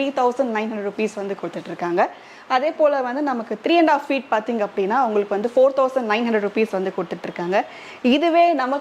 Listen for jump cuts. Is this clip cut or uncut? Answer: uncut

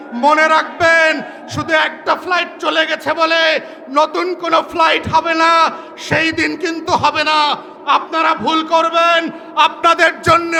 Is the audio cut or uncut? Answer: uncut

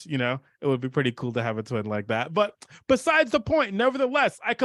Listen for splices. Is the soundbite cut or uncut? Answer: uncut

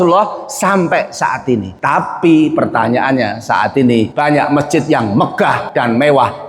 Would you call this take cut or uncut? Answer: cut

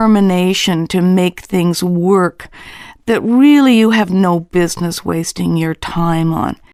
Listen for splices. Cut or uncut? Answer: uncut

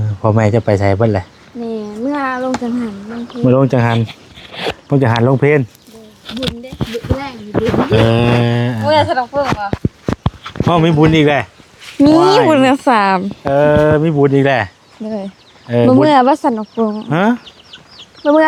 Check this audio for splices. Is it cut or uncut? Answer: uncut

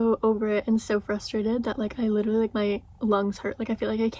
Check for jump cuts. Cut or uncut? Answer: uncut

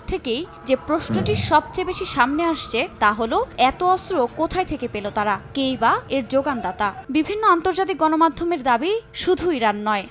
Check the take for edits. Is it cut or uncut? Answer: uncut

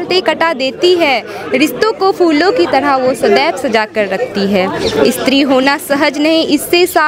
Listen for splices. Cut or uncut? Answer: uncut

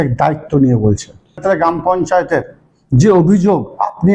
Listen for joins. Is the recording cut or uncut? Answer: cut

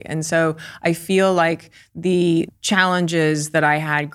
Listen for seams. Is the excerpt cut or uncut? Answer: cut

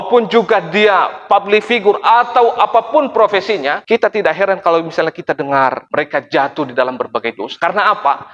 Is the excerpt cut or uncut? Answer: cut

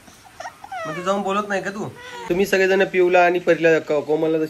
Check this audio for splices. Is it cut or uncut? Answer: cut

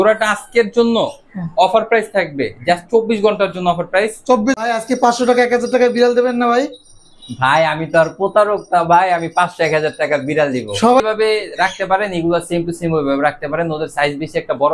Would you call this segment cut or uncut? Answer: cut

